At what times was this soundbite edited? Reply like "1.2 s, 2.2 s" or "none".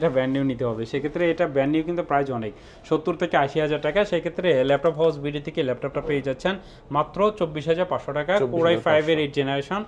none